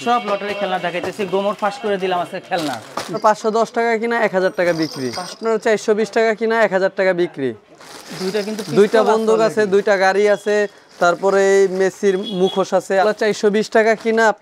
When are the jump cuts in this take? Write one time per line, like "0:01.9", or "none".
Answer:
0:03.2
0:05.4
0:13.0